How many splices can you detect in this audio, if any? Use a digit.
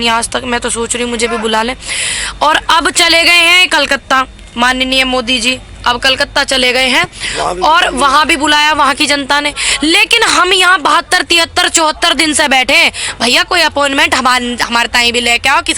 0